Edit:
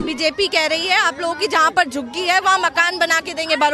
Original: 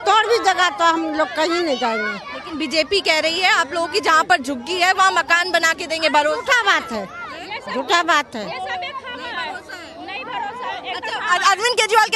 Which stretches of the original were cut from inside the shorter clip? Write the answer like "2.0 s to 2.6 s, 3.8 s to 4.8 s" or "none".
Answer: none